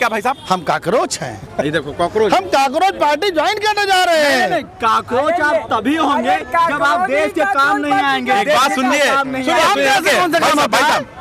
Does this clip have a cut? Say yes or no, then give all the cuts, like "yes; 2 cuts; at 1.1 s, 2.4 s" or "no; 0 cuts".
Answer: no; 0 cuts